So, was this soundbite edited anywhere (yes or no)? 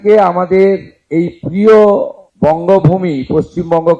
yes